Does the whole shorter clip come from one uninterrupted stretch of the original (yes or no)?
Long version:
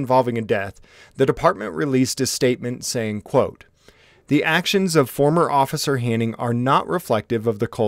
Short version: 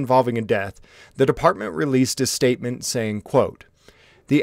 yes